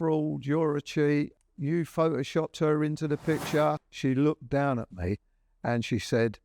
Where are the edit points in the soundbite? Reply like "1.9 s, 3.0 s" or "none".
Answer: 1.4 s, 3.9 s